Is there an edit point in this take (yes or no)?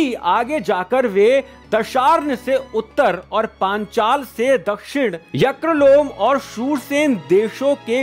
no